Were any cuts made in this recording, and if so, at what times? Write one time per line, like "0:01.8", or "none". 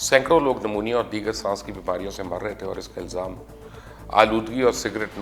none